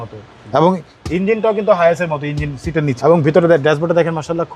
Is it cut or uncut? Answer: cut